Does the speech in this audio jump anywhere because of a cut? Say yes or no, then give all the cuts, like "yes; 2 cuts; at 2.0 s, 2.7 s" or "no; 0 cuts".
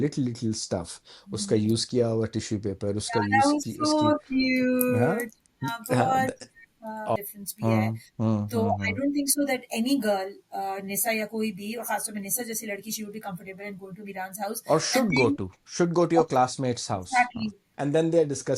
yes; 2 cuts; at 7.2 s, 17.6 s